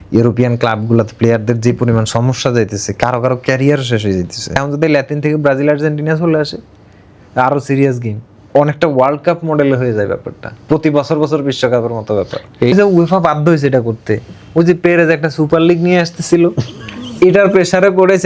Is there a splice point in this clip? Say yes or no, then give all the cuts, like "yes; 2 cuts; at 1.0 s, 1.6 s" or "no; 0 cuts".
yes; 2 cuts; at 4.6 s, 12.7 s